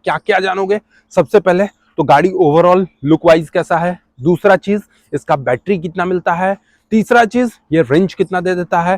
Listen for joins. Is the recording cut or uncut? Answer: uncut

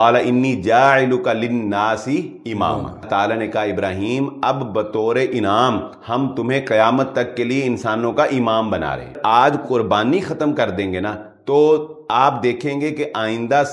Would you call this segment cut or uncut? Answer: cut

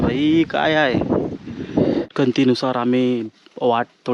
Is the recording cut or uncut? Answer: cut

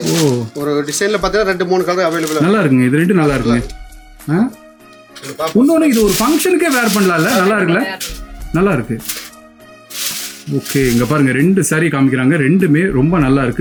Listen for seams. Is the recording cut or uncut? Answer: uncut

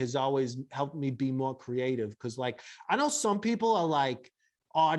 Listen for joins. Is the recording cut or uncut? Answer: uncut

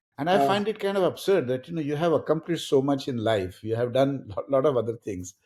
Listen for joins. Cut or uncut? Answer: uncut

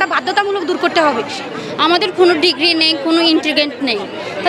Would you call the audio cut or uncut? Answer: cut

